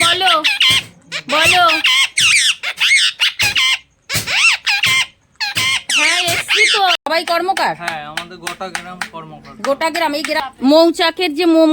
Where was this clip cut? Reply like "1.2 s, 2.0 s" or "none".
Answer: 7.0 s, 10.4 s